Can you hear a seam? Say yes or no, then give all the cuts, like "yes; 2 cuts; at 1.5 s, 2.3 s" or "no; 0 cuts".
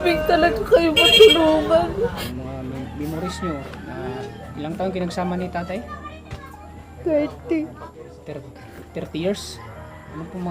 yes; 1 cut; at 2.3 s